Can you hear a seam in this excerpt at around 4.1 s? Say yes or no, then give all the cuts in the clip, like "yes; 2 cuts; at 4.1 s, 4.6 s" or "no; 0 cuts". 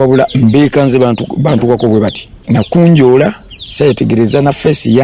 no; 1 cut; at 2.3 s